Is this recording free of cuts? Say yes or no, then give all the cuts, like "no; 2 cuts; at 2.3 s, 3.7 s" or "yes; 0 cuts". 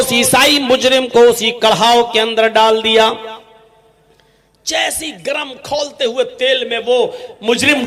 yes; 0 cuts